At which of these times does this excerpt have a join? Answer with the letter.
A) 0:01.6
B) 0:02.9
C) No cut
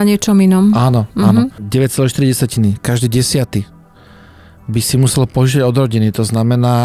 A